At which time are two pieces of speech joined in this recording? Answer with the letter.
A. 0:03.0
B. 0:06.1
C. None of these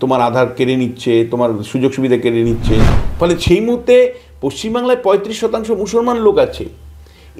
A